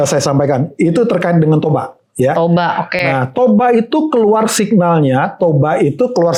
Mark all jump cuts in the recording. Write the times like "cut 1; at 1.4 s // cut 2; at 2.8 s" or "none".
none